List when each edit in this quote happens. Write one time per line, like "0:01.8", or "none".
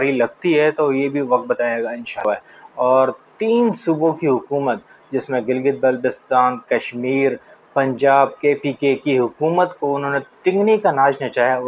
0:02.2